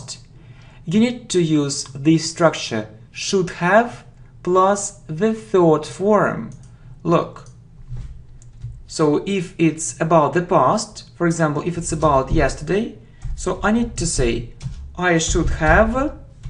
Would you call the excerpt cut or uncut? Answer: cut